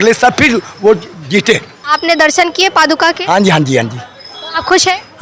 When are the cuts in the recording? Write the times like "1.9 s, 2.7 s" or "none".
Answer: 1.7 s